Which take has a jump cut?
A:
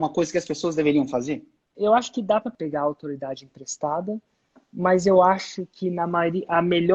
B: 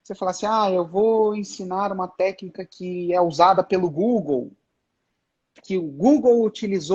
A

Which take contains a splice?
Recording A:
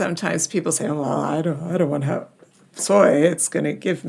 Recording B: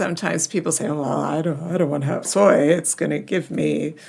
B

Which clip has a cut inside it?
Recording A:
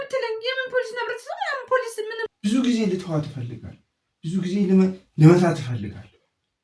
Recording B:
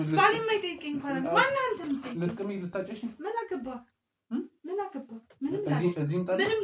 A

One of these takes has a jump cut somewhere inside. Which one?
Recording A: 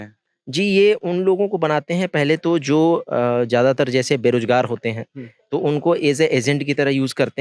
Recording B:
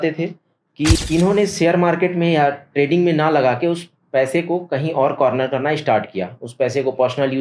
B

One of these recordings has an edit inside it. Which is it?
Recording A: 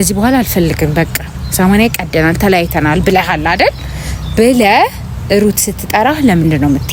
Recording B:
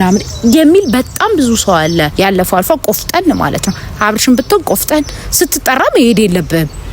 B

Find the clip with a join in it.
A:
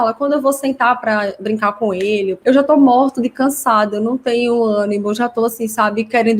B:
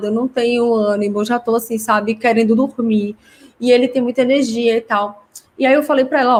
A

